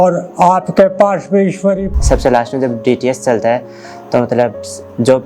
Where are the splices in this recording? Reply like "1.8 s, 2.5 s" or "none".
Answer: 1.9 s